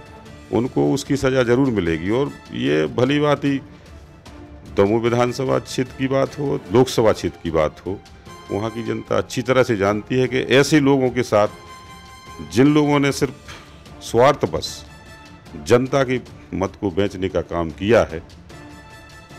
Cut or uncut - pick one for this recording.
uncut